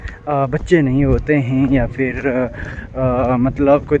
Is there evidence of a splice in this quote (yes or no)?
no